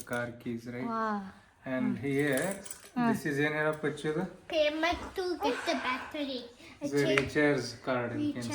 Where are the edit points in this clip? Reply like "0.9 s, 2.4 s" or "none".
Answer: none